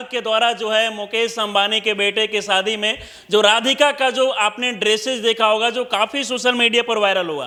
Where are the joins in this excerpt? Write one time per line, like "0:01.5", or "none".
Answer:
none